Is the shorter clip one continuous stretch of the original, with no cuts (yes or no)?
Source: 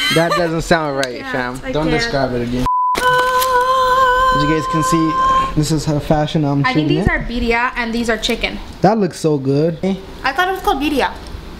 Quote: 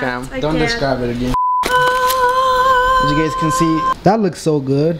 no